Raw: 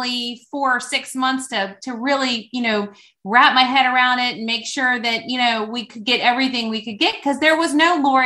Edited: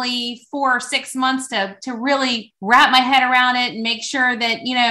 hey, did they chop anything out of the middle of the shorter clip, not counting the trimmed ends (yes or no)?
yes